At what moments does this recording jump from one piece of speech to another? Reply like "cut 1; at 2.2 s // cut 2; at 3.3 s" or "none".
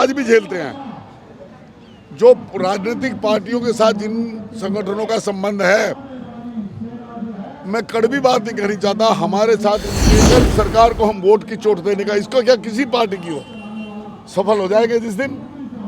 cut 1; at 10.1 s